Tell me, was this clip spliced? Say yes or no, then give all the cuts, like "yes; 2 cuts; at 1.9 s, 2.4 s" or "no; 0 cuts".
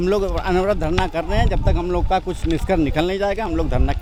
no; 0 cuts